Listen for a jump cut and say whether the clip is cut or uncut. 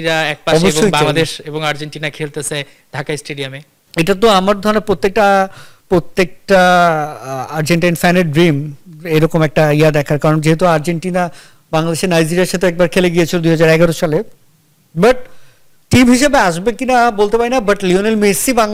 uncut